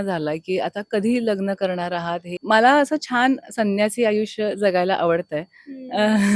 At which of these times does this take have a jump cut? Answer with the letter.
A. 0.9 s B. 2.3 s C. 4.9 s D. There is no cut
B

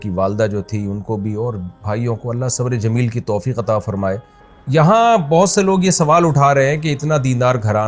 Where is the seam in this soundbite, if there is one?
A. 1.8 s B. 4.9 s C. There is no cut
B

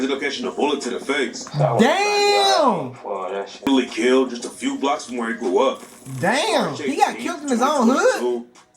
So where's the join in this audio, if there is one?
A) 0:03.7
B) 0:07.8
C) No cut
A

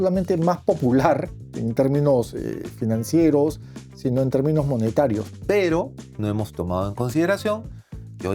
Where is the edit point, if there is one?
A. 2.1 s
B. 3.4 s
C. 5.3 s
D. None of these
C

